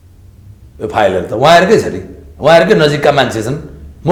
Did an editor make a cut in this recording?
no; 0 cuts

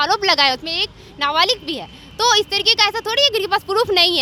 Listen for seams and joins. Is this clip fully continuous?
yes; 0 cuts

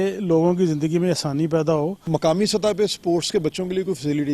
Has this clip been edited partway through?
yes; 1 cut; at 2.1 s

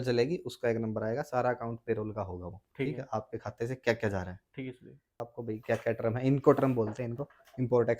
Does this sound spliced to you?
yes; 1 cut; at 5.3 s

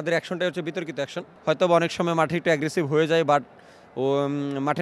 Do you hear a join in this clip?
yes; 1 cut; at 1.3 s

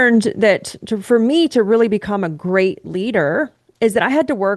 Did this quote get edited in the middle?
no; 0 cuts

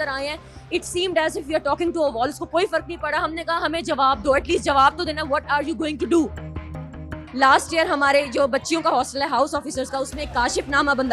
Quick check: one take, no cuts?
yes; 0 cuts

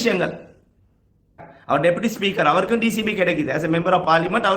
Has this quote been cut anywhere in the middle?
yes; 1 cut; at 1.5 s

